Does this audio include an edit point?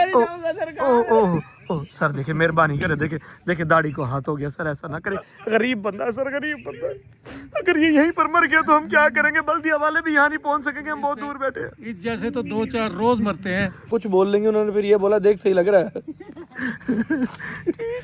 yes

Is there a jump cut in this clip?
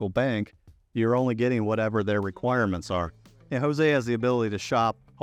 no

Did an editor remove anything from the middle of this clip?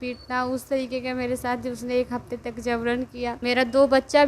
yes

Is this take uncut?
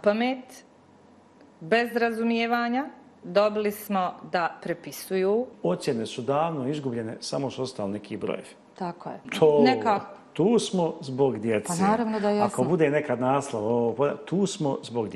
no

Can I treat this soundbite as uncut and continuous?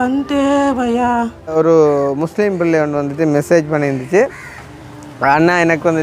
no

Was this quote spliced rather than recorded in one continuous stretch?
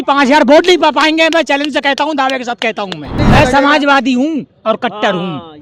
yes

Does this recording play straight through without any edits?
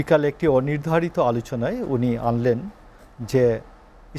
yes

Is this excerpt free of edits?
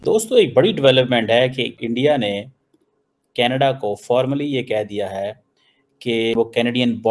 no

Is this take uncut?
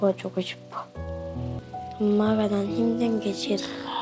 no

